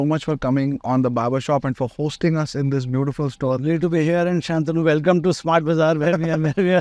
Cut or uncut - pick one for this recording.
uncut